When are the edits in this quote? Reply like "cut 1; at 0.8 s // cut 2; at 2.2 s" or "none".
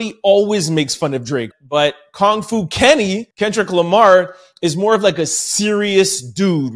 cut 1; at 1.5 s // cut 2; at 3.3 s